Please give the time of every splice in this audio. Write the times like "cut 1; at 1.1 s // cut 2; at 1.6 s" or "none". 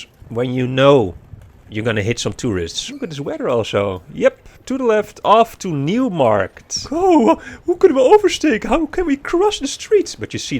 cut 1; at 2.8 s // cut 2; at 6.9 s